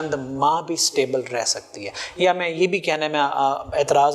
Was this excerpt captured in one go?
yes; 0 cuts

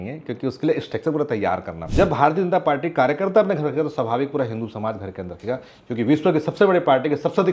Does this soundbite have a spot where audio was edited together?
yes; 1 cut; at 1.8 s

